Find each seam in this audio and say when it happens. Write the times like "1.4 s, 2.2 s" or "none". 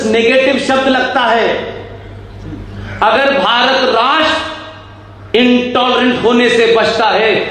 none